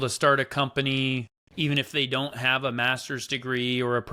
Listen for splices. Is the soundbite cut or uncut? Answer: uncut